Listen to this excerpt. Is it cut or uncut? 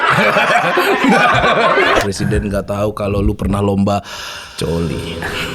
cut